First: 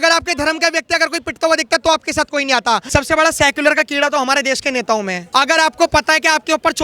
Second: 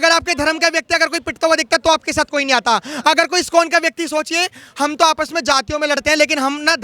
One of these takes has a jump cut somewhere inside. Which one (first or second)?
first